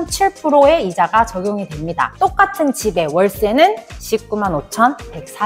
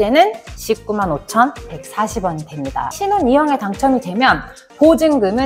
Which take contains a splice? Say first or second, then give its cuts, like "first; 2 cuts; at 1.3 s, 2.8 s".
second; 1 cut; at 2.9 s